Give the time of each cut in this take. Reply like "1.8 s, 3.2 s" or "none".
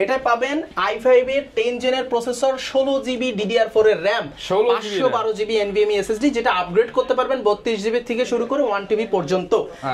none